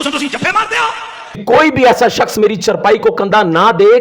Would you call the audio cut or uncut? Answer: cut